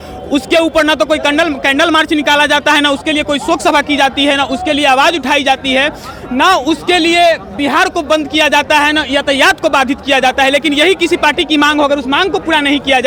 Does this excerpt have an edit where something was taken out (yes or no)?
no